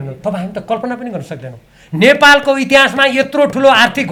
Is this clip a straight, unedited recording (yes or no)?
yes